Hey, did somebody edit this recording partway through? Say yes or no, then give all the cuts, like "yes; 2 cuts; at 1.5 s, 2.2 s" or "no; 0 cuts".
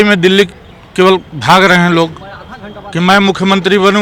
no; 0 cuts